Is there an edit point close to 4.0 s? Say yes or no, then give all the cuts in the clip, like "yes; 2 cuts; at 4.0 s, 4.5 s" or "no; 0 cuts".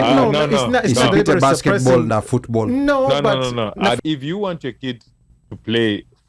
yes; 1 cut; at 4.0 s